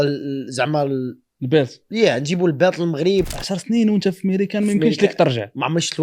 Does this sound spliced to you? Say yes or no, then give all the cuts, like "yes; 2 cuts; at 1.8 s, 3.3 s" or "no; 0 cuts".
yes; 1 cut; at 3.3 s